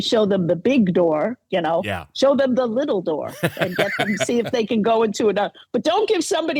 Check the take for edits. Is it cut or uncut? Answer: uncut